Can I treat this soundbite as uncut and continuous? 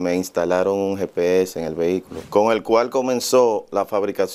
no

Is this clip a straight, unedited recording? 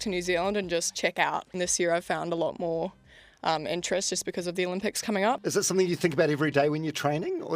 no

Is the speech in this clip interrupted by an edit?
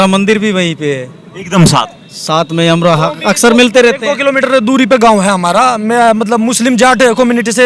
no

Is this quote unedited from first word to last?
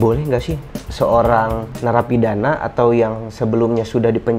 no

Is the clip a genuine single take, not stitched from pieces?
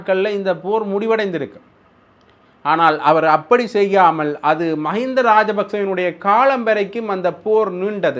yes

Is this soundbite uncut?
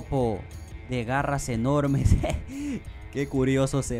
yes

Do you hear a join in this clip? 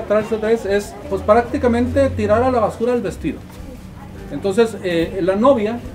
no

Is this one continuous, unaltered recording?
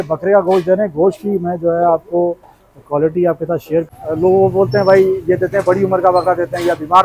no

